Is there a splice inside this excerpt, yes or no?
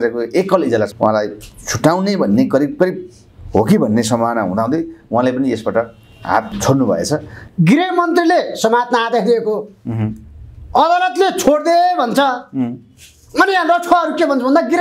yes